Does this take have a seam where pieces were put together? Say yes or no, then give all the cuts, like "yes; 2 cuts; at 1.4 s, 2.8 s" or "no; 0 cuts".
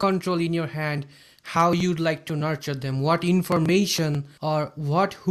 yes; 1 cut; at 4.3 s